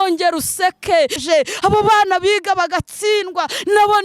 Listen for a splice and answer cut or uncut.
cut